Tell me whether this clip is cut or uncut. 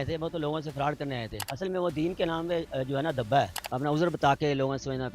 cut